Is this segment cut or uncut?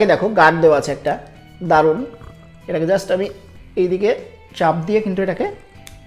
uncut